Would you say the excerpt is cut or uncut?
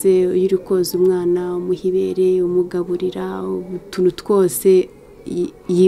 uncut